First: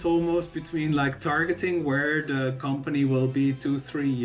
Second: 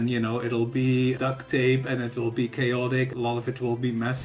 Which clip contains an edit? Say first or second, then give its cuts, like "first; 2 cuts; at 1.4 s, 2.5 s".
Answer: second; 2 cuts; at 1.2 s, 3.1 s